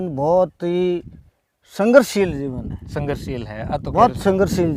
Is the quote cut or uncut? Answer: uncut